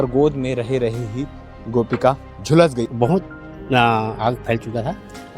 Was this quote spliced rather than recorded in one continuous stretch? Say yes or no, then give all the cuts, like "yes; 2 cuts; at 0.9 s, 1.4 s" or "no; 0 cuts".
yes; 1 cut; at 2.9 s